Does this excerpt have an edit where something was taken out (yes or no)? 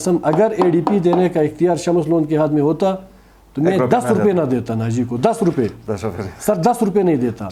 no